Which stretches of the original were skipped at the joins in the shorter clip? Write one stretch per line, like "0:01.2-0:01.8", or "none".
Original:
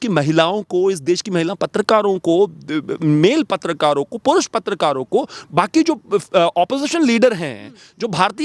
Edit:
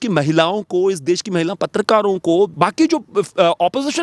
0:02.5-0:05.5